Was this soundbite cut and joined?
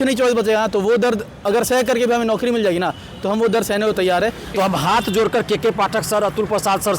yes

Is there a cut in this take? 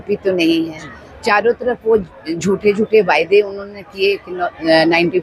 no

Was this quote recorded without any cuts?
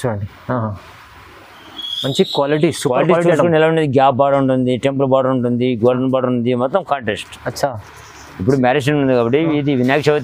yes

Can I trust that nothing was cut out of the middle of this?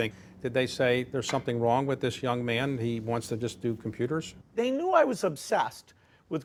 yes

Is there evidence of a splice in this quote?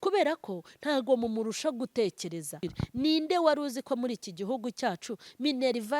yes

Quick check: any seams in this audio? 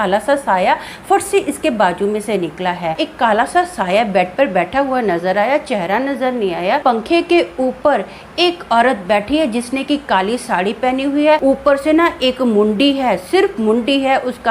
yes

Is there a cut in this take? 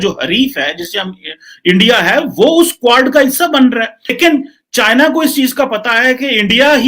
yes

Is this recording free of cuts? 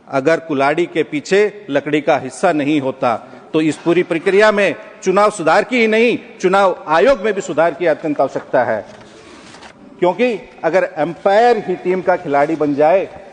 yes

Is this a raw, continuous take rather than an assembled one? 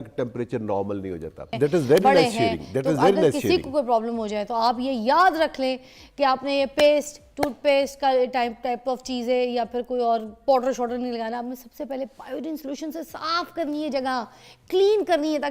no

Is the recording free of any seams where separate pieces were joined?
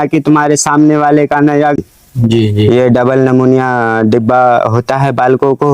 no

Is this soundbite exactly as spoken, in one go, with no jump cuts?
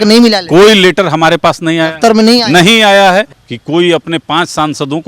no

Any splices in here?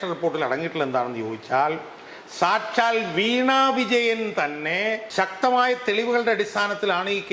yes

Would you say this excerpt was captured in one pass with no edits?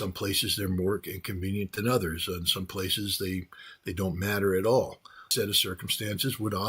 no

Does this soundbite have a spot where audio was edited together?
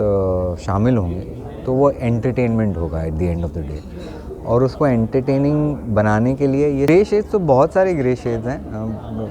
yes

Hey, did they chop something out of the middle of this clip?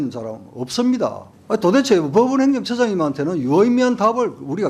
yes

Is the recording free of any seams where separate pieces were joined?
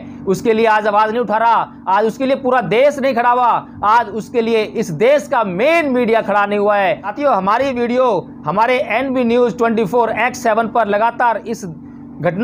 yes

